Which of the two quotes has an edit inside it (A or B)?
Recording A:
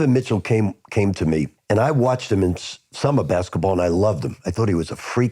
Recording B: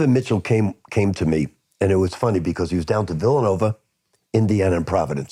A